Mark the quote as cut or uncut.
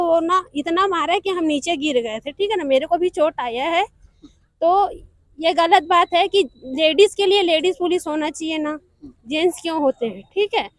uncut